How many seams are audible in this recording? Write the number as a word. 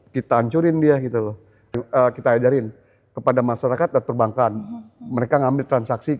one